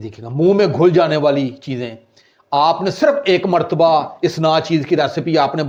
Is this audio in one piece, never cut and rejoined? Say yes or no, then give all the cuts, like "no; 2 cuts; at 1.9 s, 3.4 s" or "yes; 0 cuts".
yes; 0 cuts